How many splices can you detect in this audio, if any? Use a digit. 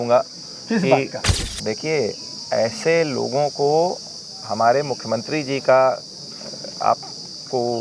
1